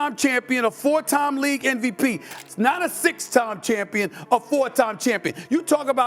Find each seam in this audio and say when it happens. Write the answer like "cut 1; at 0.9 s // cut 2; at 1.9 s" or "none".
cut 1; at 2.3 s